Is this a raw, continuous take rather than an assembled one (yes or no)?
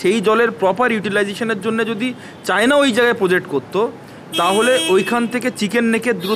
yes